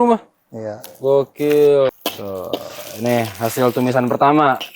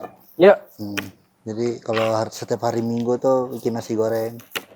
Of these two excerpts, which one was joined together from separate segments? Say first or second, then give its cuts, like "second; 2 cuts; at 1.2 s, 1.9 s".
first; 1 cut; at 1.9 s